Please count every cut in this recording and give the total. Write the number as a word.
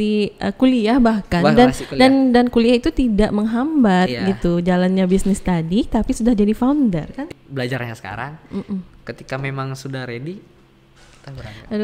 one